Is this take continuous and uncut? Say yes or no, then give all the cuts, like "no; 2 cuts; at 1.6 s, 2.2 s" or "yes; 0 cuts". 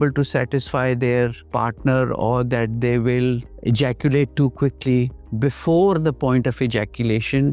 no; 3 cuts; at 1.4 s, 3.5 s, 5.1 s